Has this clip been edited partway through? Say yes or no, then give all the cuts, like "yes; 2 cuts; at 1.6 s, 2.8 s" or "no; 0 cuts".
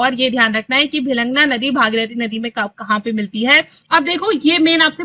yes; 1 cut; at 3.8 s